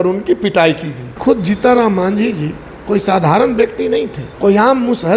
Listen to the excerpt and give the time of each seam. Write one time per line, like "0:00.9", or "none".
0:01.1
0:04.2